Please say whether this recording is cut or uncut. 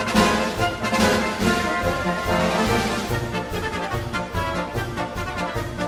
uncut